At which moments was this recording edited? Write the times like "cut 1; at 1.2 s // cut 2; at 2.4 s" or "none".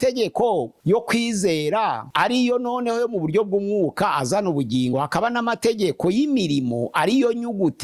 none